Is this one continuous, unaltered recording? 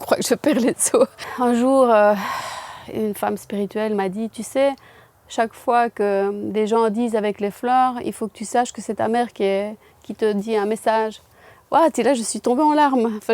no; 1 cut; at 1.2 s

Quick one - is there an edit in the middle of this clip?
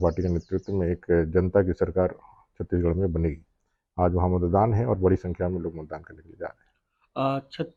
no; 0 cuts

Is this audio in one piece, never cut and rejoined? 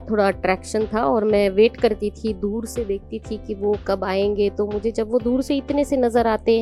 yes; 0 cuts

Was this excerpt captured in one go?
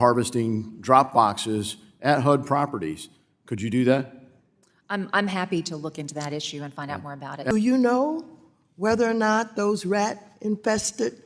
no; 1 cut; at 7.5 s

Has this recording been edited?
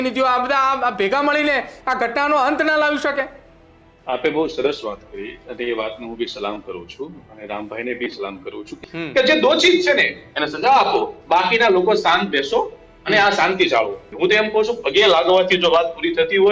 yes; 2 cuts; at 8.7 s, 14.0 s

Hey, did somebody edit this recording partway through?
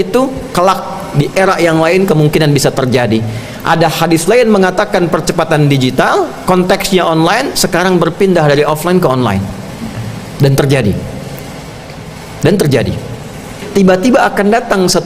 yes; 1 cut; at 13.6 s

